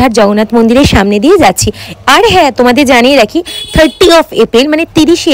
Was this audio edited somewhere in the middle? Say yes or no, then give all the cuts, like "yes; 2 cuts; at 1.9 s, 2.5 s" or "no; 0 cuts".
no; 0 cuts